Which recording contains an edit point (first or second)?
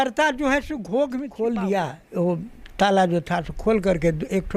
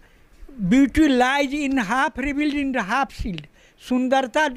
first